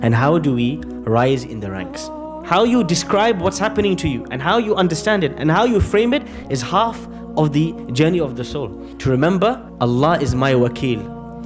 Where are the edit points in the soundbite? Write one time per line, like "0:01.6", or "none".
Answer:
0:02.3
0:08.9
0:09.7